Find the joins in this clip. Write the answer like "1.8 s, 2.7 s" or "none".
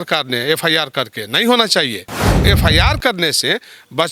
2.4 s